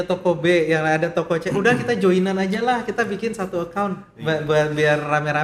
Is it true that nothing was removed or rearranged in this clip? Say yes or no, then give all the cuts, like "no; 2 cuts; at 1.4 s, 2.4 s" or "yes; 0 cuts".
yes; 0 cuts